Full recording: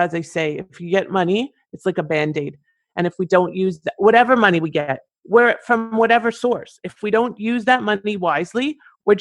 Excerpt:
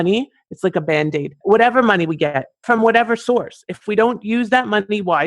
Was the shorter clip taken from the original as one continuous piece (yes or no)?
no